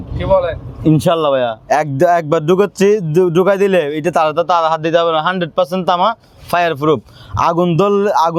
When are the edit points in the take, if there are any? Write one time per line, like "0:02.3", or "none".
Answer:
none